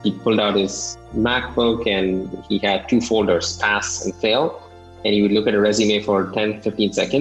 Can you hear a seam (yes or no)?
yes